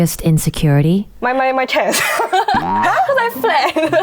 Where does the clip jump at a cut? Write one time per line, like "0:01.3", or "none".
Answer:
0:01.1